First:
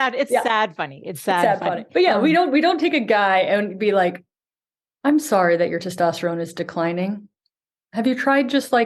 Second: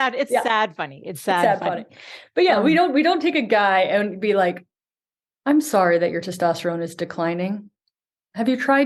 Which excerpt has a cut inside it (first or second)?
first